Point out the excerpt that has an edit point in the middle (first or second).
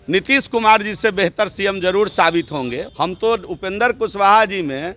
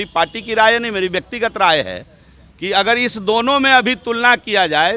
first